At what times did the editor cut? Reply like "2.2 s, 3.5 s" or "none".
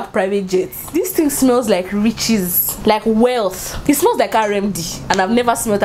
0.9 s, 2.6 s, 3.7 s